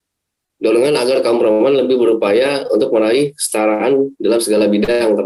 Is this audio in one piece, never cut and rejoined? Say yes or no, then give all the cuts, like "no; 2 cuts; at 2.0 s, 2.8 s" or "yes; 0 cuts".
yes; 0 cuts